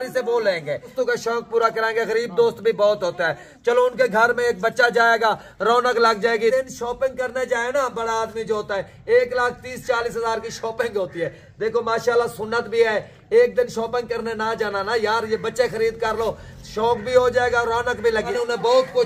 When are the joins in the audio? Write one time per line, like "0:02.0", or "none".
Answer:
0:00.9
0:06.5
0:18.3